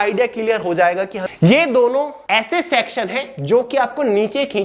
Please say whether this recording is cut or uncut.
cut